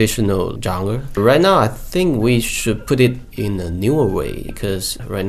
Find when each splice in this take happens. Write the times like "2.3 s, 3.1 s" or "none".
1.2 s